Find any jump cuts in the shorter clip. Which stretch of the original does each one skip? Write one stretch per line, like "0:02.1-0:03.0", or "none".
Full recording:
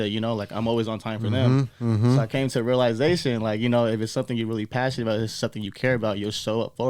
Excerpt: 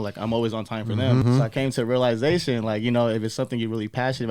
0:01.6-0:02.0